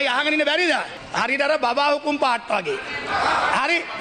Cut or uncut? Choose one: cut